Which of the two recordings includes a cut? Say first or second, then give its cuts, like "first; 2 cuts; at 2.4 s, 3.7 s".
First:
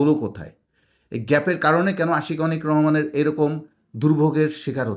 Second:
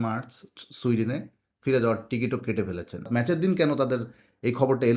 second; 1 cut; at 3.1 s